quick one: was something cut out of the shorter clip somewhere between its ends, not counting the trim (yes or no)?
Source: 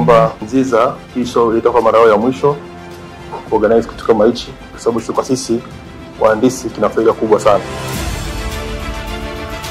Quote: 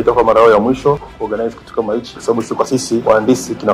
yes